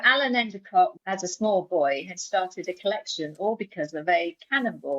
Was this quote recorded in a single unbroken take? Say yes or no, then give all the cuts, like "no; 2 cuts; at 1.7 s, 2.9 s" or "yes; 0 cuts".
no; 1 cut; at 0.9 s